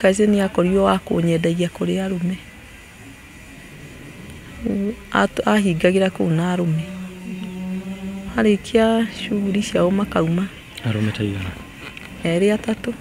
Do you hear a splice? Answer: no; 0 cuts

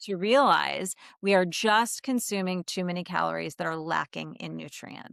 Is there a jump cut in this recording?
no; 0 cuts

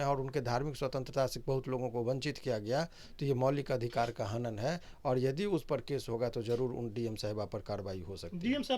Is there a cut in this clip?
no; 0 cuts

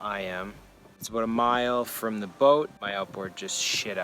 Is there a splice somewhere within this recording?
yes; 2 cuts; at 1.0 s, 2.8 s

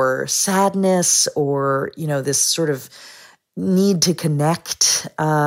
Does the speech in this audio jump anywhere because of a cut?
no; 0 cuts

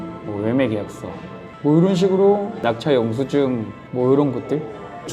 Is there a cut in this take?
no; 0 cuts

